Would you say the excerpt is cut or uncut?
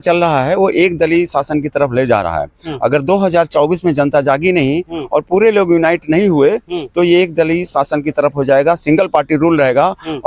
uncut